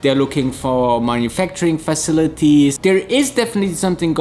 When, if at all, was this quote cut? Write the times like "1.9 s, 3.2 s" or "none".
2.8 s